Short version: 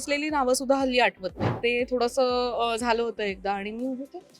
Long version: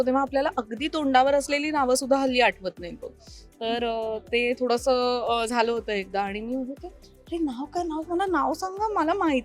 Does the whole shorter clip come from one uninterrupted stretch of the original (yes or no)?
no